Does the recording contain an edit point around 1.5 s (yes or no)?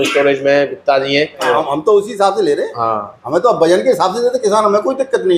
yes